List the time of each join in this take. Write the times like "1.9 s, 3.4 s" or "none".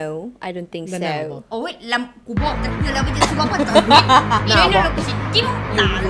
none